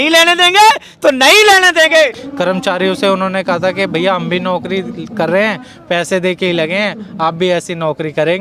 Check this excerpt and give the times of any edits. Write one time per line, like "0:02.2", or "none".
0:02.2